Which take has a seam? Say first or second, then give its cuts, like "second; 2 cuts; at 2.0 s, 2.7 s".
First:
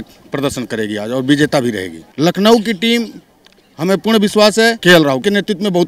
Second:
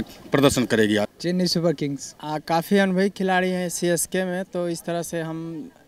second; 2 cuts; at 1.0 s, 2.2 s